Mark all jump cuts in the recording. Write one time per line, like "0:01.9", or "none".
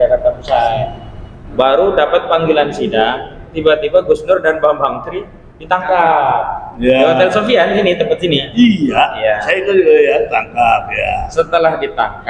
none